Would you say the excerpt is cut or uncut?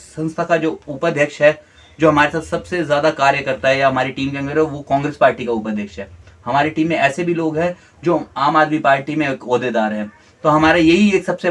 uncut